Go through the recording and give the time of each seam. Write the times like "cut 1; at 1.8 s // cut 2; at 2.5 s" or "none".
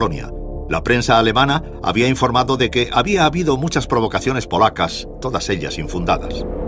cut 1; at 4.4 s